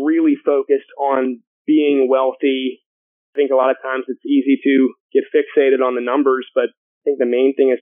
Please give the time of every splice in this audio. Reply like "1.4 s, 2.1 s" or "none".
1.5 s, 3.2 s, 5.0 s, 6.9 s